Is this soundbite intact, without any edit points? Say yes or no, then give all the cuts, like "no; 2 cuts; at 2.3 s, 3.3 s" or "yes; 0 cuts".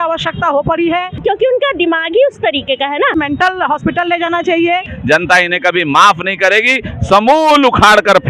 no; 3 cuts; at 1.2 s, 3.1 s, 4.9 s